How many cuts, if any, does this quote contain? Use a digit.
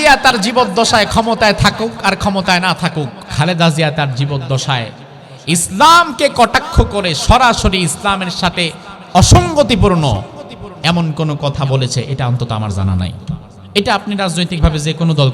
2